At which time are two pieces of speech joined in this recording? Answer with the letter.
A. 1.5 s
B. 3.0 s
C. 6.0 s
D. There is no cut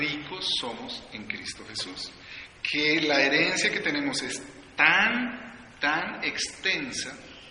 C